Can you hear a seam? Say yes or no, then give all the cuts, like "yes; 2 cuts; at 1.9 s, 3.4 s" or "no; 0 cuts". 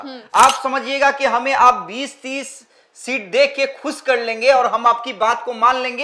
no; 0 cuts